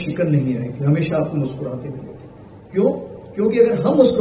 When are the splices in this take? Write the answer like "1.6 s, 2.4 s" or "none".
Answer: none

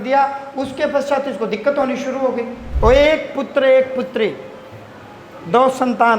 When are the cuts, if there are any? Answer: 2.6 s

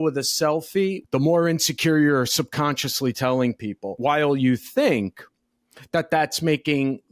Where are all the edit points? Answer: 1.0 s, 4.0 s

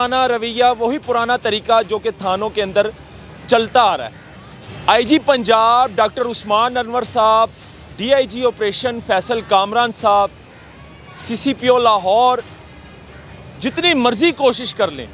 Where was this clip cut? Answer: none

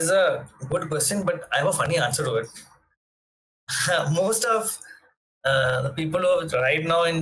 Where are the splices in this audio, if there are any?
none

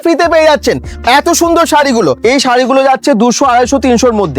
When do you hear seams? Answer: 2.2 s

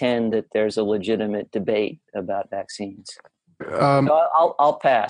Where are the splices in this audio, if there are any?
3.7 s

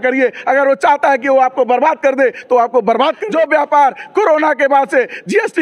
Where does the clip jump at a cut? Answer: 3.2 s

